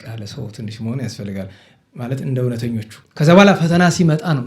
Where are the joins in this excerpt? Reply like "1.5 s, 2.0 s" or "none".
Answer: 3.0 s